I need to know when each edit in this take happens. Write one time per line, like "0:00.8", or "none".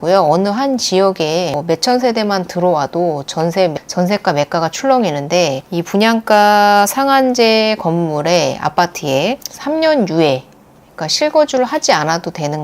0:01.5